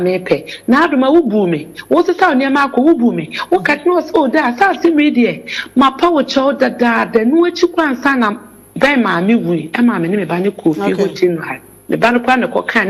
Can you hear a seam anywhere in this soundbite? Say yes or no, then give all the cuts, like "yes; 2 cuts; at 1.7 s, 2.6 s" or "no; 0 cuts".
no; 0 cuts